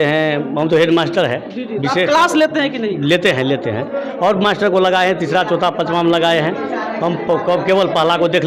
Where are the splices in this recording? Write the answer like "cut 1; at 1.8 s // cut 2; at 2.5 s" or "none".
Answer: none